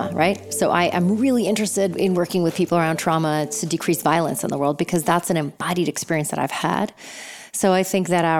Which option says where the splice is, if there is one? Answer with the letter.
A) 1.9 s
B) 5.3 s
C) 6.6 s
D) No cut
A